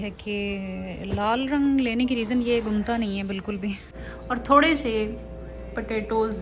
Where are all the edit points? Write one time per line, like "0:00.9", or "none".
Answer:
0:03.9